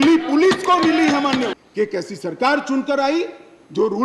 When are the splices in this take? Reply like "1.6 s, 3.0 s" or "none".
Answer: 1.6 s